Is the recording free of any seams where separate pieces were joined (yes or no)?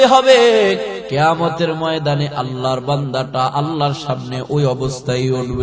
no